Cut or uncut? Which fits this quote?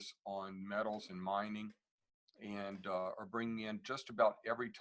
uncut